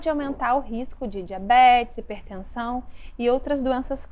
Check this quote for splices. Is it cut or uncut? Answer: uncut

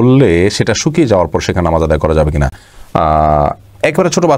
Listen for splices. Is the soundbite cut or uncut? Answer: uncut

